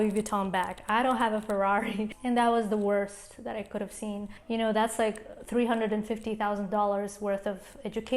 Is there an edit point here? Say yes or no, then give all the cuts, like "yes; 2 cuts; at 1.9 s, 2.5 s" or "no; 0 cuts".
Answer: yes; 2 cuts; at 2.1 s, 4.3 s